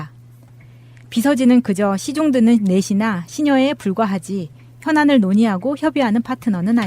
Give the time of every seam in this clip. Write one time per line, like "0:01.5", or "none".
0:03.4

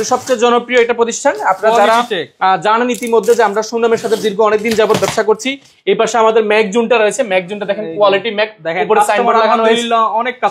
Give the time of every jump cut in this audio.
none

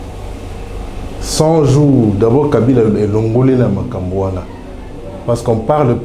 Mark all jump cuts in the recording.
none

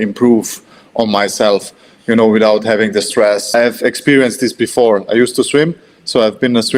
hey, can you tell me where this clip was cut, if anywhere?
0:03.5

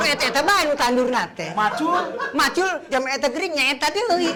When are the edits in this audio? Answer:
none

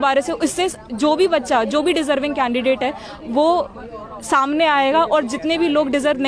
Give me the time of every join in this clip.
none

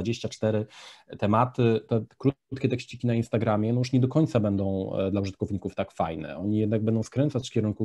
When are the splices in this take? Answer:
0:01.9

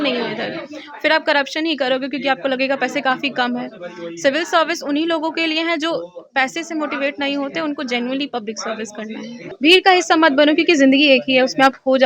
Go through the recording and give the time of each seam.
0:09.4

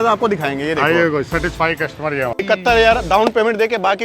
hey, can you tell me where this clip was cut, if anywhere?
0:02.4

